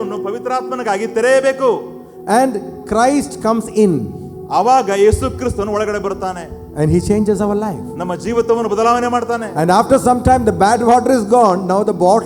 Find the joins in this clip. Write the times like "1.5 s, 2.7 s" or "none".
none

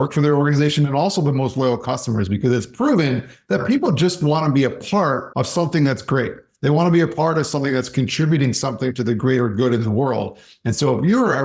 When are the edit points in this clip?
5.3 s

